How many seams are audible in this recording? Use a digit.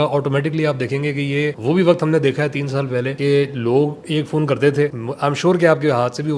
3